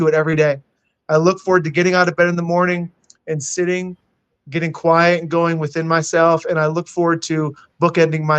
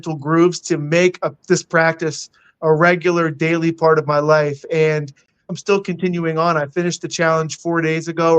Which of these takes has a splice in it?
second; 1 cut; at 5.5 s

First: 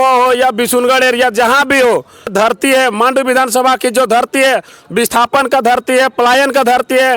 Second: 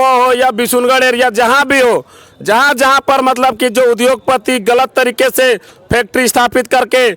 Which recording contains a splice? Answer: first; 1 cut; at 2.3 s

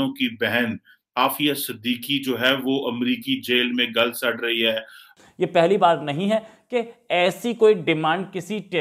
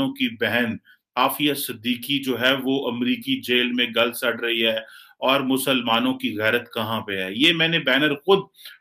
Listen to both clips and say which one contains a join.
first; 1 cut; at 5.0 s

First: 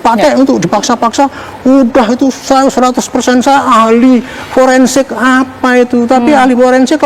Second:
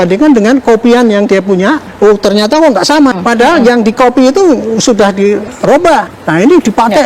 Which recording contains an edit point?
second; 3 cuts; at 1.9 s, 3.1 s, 5.8 s

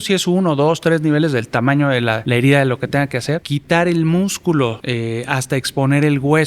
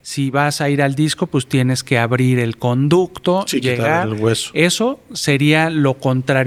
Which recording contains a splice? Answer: first; 3 cuts; at 2.2 s, 3.5 s, 4.8 s

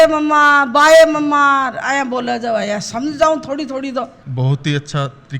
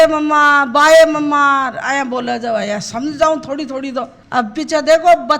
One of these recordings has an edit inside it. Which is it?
first; 1 cut; at 4.2 s

